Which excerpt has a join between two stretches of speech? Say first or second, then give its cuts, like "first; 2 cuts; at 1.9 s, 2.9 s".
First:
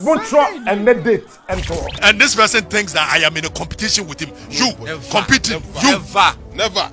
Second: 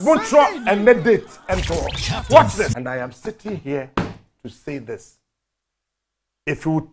first; 1 cut; at 2.0 s